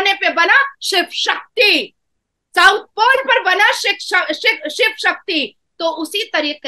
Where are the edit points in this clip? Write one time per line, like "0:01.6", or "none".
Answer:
none